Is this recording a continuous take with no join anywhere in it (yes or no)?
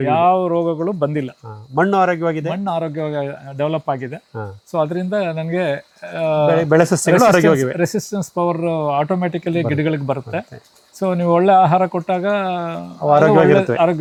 yes